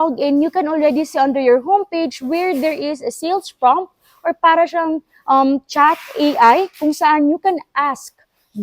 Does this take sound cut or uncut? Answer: uncut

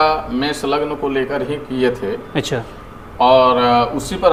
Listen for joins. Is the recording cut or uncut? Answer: uncut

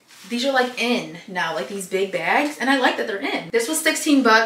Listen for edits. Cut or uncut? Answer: uncut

